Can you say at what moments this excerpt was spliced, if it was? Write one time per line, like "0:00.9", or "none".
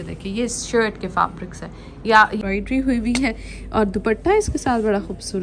0:02.4